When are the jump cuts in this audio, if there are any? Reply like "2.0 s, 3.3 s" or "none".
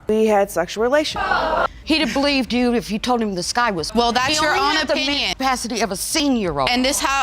1.7 s

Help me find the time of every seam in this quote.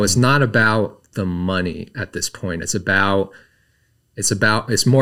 none

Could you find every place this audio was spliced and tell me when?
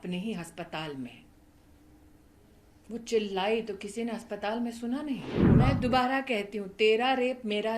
5.4 s

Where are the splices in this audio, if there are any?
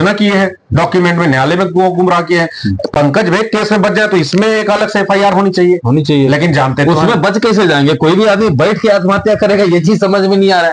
none

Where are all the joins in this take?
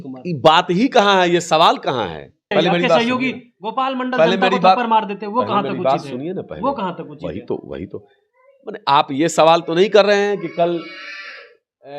2.5 s

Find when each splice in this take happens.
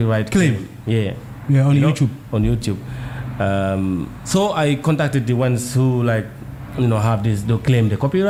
none

